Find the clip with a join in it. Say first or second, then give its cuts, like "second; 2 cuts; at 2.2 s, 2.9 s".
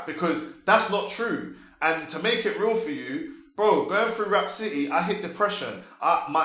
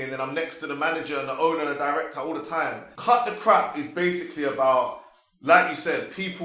second; 1 cut; at 2.9 s